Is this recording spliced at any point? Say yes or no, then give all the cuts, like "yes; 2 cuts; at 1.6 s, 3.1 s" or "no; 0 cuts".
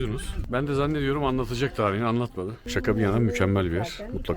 no; 0 cuts